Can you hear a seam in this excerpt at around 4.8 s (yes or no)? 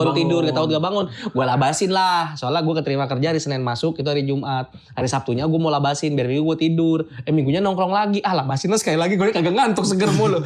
no